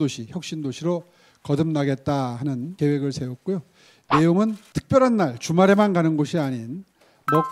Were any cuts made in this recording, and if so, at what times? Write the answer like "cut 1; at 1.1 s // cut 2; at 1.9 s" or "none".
cut 1; at 2.7 s // cut 2; at 4.7 s